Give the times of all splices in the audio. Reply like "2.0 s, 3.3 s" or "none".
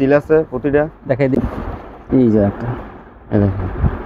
1.4 s

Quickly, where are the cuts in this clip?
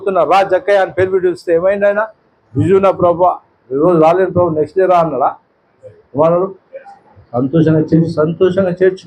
none

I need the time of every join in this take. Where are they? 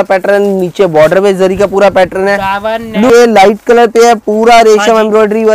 3.1 s

